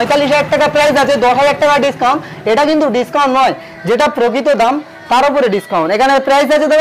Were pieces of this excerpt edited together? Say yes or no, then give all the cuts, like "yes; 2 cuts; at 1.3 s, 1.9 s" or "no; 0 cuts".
no; 0 cuts